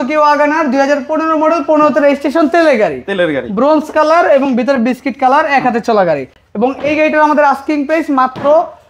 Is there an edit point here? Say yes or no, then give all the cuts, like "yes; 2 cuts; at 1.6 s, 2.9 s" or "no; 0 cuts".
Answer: no; 0 cuts